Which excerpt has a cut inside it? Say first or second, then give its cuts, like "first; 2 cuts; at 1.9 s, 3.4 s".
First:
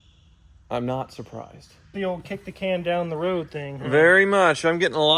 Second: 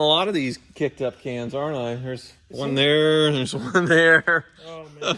first; 1 cut; at 1.9 s